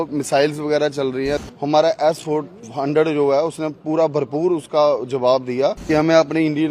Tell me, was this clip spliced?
yes; 2 cuts; at 1.4 s, 5.8 s

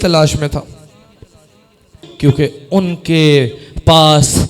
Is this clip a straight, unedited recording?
no; 1 cut; at 2.0 s

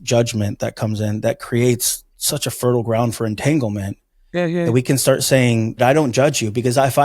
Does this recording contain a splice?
yes; 1 cut; at 5.8 s

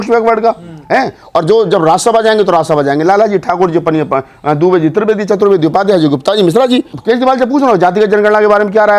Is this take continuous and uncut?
no; 1 cut; at 6.9 s

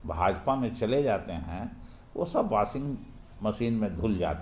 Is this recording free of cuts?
yes; 0 cuts

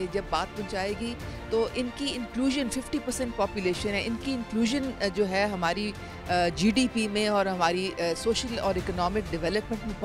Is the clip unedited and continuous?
yes; 0 cuts

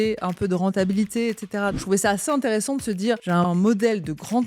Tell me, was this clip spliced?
yes; 2 cuts; at 1.8 s, 3.3 s

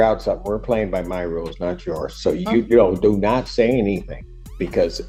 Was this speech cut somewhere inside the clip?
no; 0 cuts

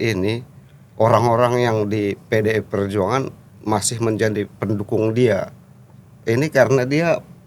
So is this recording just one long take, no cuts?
yes; 0 cuts

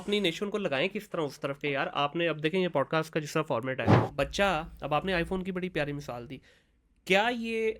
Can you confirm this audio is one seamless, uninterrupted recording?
no; 1 cut; at 4.0 s

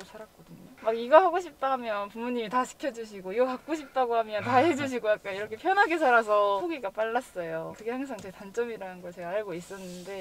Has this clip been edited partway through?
no; 0 cuts

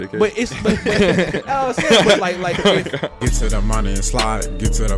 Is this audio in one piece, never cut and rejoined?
no; 1 cut; at 3.1 s

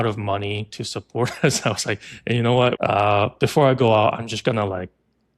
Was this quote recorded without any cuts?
no; 1 cut; at 2.8 s

